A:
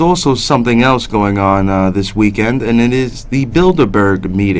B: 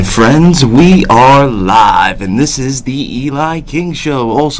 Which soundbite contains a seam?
A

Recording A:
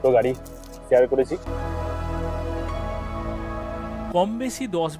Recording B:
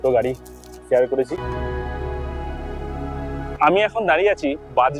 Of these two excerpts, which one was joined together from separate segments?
B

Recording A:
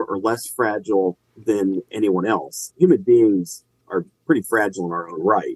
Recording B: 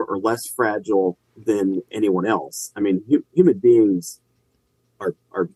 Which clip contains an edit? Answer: A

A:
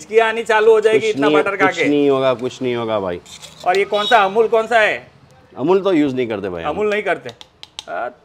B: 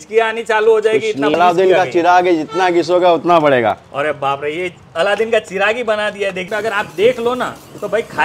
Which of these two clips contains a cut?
B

